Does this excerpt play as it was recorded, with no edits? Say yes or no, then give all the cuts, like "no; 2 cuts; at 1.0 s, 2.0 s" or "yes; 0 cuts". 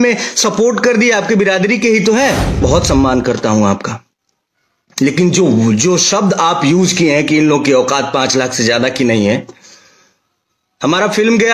no; 1 cut; at 2.6 s